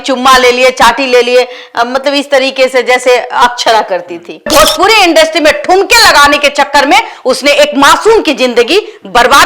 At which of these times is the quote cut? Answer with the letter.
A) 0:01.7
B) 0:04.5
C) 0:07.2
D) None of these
B